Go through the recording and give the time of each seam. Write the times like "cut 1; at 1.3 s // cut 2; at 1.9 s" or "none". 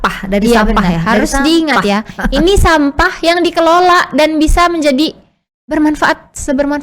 none